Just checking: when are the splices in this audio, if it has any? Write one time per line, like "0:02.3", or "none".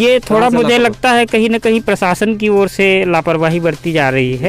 none